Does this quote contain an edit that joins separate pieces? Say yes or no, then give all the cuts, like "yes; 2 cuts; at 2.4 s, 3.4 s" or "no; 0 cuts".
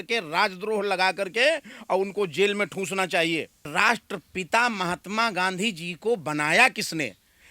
yes; 1 cut; at 3.7 s